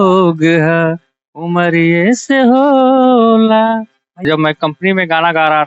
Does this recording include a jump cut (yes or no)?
yes